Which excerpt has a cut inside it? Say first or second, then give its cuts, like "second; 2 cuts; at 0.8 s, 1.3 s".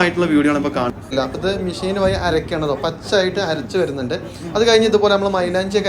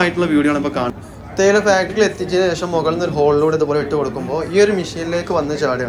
first; 1 cut; at 1.1 s